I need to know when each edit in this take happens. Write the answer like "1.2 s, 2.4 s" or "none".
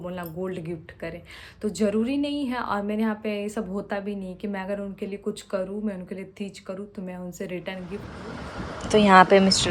8.1 s